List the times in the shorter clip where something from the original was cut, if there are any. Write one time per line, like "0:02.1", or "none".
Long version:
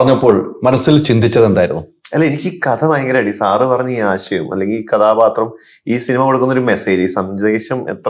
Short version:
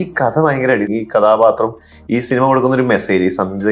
0:00.9